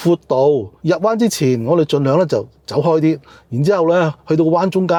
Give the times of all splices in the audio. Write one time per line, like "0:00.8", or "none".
none